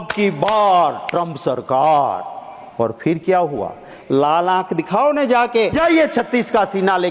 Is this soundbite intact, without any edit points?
no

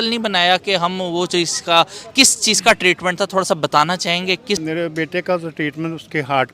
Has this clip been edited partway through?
yes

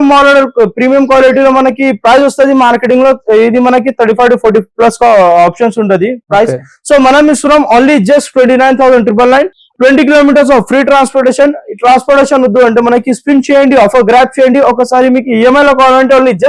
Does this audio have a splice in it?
no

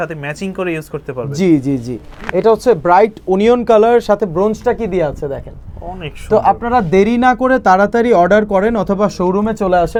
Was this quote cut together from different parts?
no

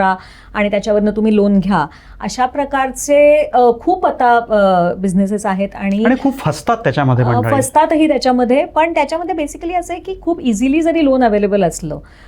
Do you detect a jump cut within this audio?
no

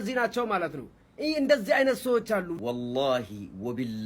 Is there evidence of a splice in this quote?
yes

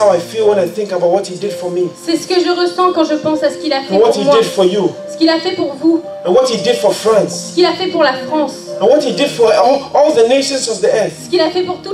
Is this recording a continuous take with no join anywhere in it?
yes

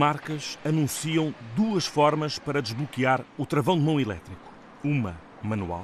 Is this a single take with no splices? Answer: yes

